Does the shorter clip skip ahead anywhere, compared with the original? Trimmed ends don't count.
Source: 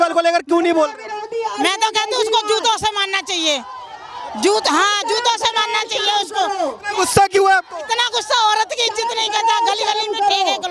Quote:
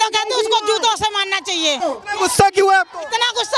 yes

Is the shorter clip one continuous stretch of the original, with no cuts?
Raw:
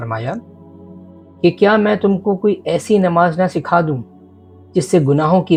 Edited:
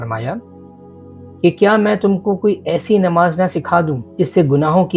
no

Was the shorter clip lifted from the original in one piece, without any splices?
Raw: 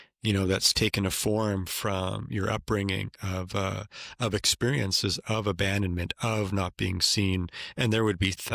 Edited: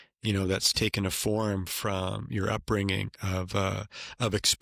yes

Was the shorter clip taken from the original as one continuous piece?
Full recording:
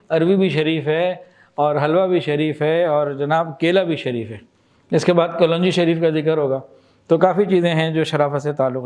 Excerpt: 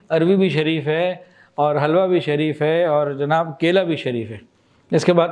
yes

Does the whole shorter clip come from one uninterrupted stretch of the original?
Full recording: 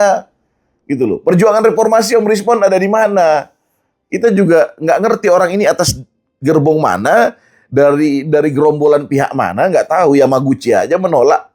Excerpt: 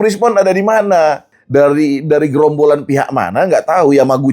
no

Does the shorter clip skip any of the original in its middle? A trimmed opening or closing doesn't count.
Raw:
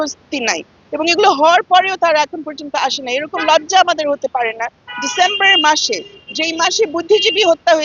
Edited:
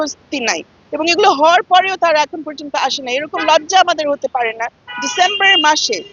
no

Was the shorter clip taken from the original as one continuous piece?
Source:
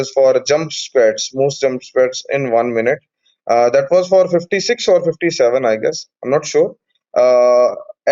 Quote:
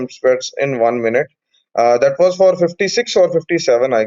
yes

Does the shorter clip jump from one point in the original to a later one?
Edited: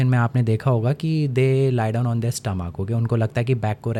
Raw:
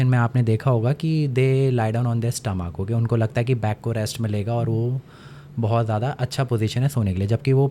no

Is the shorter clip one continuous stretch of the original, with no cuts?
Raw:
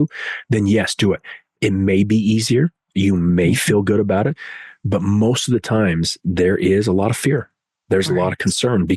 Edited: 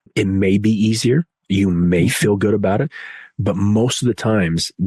yes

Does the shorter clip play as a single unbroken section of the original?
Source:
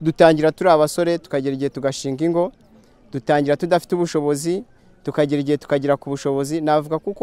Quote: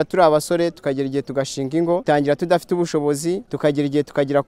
no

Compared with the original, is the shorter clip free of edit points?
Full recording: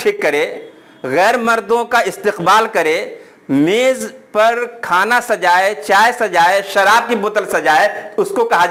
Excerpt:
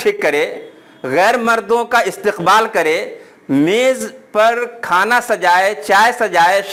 yes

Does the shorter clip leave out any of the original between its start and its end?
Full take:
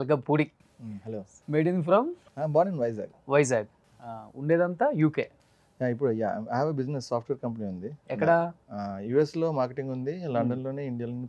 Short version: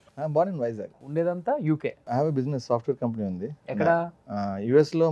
yes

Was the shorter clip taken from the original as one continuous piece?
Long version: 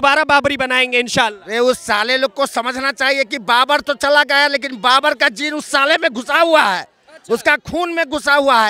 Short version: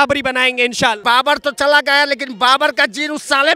no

